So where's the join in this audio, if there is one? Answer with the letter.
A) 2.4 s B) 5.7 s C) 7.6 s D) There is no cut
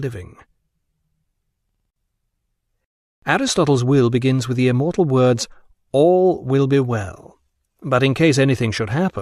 D